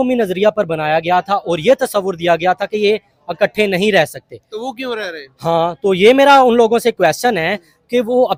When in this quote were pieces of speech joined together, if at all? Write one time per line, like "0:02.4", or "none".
none